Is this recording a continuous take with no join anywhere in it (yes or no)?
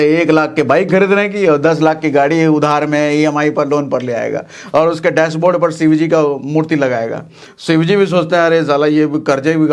yes